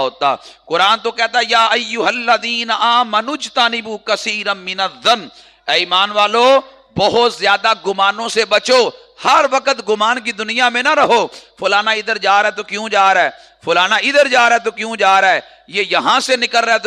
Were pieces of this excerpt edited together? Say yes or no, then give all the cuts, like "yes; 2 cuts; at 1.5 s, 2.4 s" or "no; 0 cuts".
no; 0 cuts